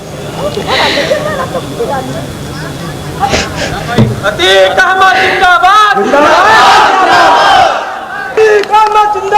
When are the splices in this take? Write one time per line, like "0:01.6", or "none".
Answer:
0:08.4